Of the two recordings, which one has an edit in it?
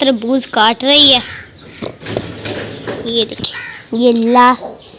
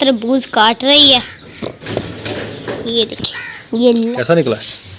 second; 2 cuts; at 1.4 s, 4.1 s

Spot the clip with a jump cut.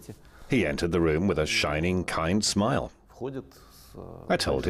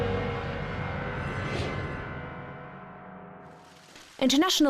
second; 1 cut; at 1.5 s

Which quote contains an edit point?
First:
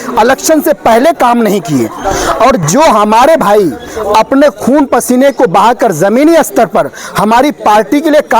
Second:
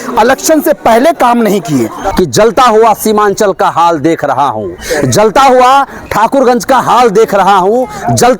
second; 1 cut; at 2.0 s

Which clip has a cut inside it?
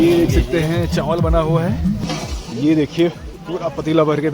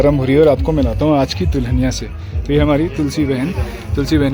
first; 1 cut; at 2.0 s

